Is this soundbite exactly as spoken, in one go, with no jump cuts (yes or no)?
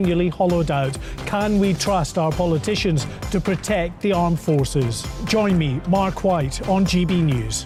yes